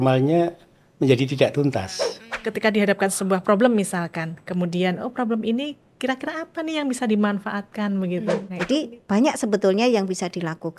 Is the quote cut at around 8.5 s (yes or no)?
yes